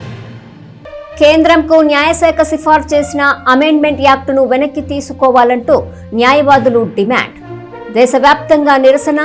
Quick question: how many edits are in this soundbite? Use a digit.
1